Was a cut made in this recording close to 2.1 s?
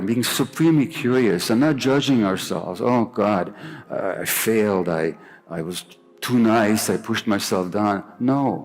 no; 1 cut; at 3.8 s

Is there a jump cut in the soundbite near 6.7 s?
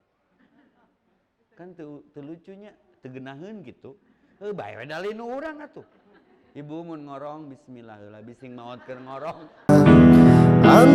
no; 1 cut; at 9.5 s

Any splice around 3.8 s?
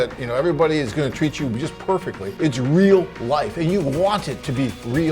no; 1 cut; at 2.3 s

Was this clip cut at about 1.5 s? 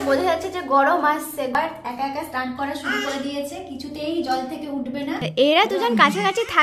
yes; 2 cuts; at 1.5 s, 5.3 s

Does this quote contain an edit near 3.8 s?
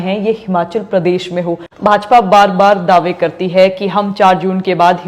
no; 1 cut; at 1.7 s

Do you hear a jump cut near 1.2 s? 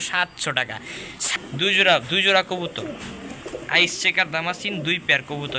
yes; 1 cut; at 1.2 s

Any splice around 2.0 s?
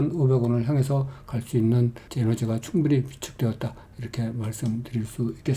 yes; 1 cut; at 2.0 s

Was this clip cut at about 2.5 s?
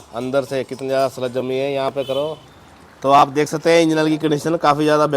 yes; 1 cut; at 2.5 s

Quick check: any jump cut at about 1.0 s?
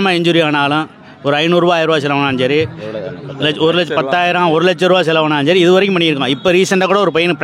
no; 0 cuts

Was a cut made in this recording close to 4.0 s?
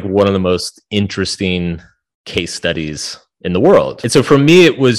yes; 1 cut; at 4.0 s

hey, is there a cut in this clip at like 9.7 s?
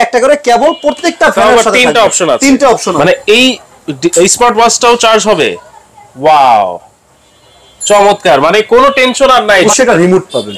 yes; 2 cuts; at 3.0 s, 9.7 s

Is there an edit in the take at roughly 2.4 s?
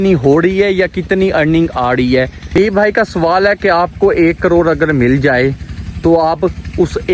yes; 1 cut; at 2.4 s

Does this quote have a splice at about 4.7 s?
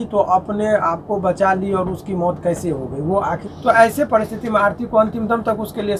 no; 1 cut; at 3.4 s

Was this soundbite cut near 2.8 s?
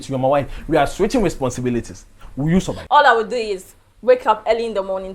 yes; 1 cut; at 2.8 s

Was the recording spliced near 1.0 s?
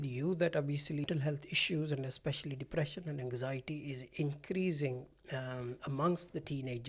yes; 1 cut; at 1.0 s

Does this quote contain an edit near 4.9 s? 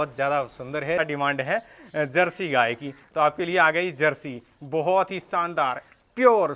no; 1 cut; at 1.0 s

